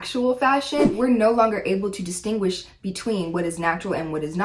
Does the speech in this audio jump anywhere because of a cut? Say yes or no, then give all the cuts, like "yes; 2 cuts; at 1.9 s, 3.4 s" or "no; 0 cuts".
yes; 1 cut; at 0.9 s